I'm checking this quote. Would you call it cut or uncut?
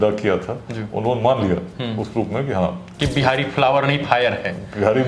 uncut